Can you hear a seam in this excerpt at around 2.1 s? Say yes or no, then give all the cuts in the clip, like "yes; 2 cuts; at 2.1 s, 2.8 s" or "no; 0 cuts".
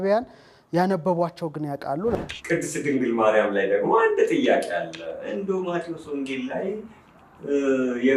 yes; 1 cut; at 2.1 s